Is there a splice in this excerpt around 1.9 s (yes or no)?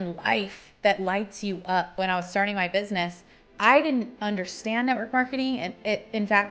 yes